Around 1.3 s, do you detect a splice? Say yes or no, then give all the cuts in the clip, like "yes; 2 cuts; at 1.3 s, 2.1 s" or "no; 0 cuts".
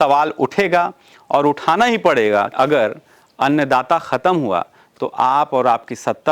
no; 1 cut; at 2.5 s